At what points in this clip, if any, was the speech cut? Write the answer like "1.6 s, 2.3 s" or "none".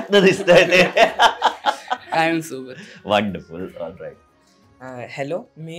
none